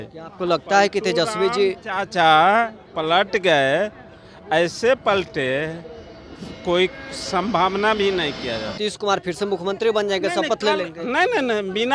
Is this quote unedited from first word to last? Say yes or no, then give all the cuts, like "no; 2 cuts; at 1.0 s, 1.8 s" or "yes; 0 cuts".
no; 1 cut; at 8.8 s